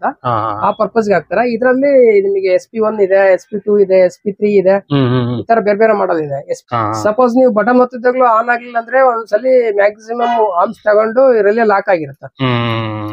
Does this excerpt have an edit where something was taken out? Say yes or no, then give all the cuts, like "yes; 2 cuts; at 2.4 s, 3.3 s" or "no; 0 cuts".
yes; 1 cut; at 6.5 s